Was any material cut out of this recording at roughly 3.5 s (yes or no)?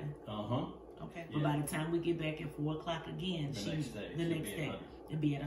no